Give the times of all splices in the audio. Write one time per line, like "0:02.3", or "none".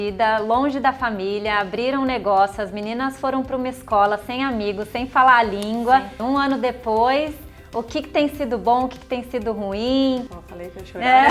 0:06.1
0:10.4